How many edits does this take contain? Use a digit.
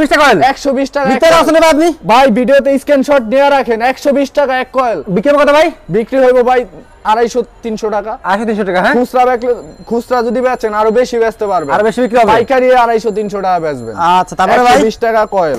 0